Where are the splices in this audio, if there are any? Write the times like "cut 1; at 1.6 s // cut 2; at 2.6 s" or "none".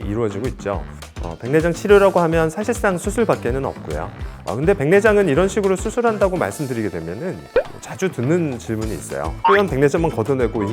cut 1; at 4.2 s